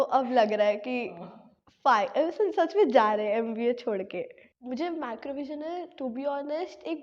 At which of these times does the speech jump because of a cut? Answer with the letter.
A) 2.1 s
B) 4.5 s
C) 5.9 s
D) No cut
B